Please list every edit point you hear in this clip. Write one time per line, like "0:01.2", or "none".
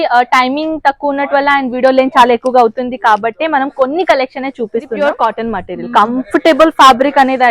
0:04.9